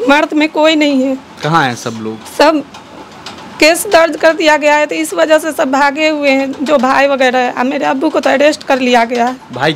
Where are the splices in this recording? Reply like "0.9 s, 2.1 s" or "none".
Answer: none